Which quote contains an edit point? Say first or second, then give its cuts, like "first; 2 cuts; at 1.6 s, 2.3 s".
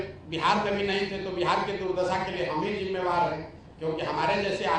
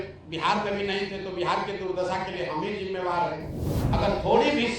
second; 1 cut; at 3.7 s